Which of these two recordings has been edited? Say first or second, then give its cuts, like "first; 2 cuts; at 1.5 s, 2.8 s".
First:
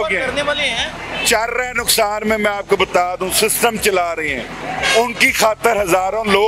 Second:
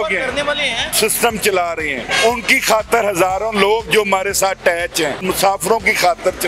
second; 3 cuts; at 0.9 s, 2.1 s, 5.2 s